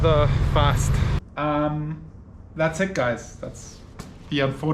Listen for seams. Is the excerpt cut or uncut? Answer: cut